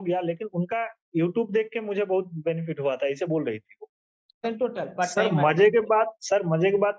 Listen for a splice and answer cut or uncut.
cut